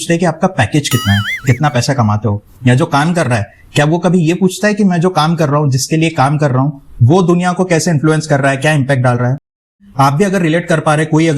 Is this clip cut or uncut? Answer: cut